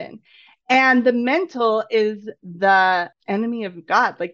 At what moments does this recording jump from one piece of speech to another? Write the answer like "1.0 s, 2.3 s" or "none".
3.1 s

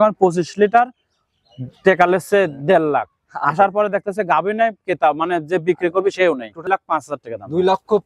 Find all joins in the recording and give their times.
6.7 s

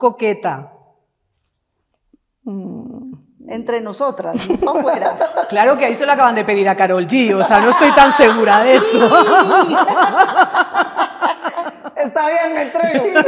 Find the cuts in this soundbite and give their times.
none

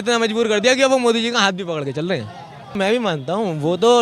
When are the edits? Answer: 2.8 s

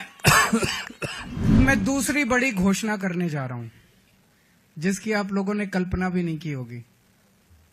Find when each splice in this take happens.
1.5 s

